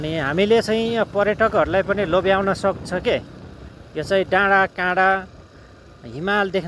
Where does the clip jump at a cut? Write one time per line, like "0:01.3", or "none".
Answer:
none

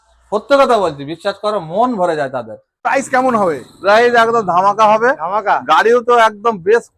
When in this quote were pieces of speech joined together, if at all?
0:02.8

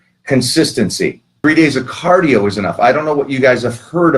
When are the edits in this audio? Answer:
0:01.3

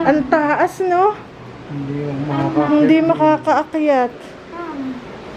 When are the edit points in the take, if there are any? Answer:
none

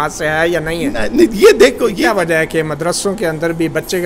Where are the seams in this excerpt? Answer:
0:02.0

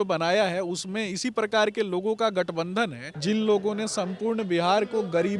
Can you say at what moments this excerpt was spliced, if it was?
0:03.1

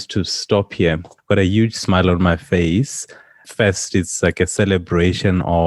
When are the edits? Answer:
0:01.1

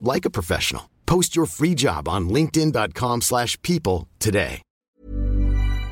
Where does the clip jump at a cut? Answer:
0:04.8

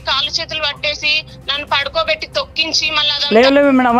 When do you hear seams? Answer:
0:03.0

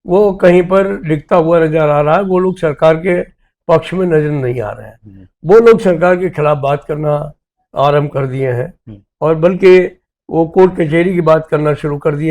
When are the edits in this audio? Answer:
none

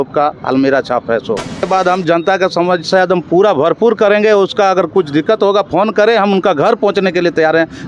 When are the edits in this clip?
0:01.7

